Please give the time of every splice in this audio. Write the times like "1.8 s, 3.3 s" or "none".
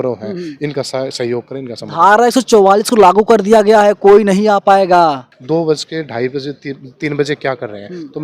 5.3 s